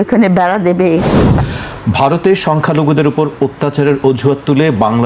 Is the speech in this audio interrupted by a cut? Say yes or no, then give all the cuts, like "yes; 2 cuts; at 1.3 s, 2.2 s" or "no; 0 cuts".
yes; 1 cut; at 1.3 s